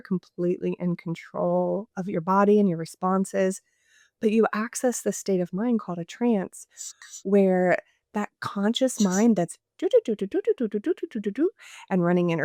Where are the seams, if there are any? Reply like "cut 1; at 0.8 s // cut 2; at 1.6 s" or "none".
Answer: none